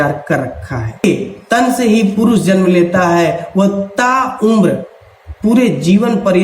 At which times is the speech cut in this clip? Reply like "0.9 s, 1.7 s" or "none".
1.0 s

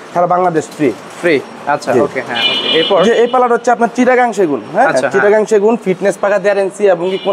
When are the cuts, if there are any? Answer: none

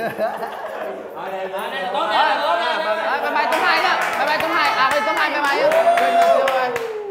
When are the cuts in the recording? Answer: none

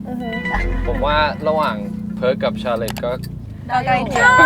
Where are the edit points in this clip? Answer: none

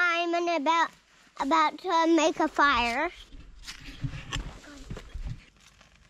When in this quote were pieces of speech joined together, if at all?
none

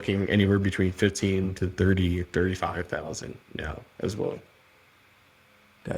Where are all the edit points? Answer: none

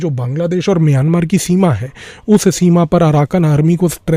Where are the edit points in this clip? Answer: none

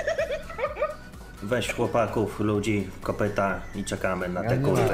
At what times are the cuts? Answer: 1.3 s

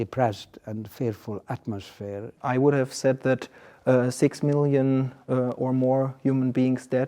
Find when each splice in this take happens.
2.3 s

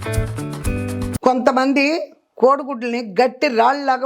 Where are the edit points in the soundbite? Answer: 1.1 s

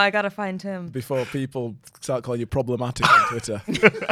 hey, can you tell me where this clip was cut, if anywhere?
2.5 s

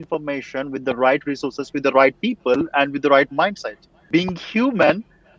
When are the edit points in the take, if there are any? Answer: 3.9 s

